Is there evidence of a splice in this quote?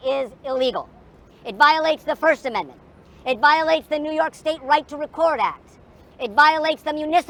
no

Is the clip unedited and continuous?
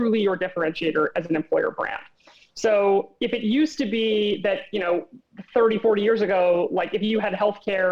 yes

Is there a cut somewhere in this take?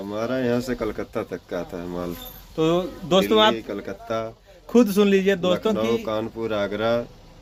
no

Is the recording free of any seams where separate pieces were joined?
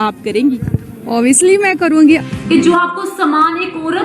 no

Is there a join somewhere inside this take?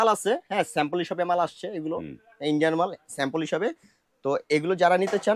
no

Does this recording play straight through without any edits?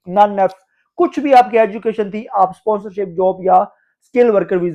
yes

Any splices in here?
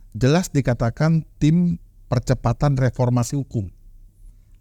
no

